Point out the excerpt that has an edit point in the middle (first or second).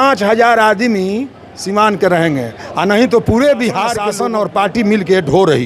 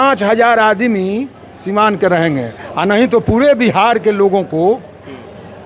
first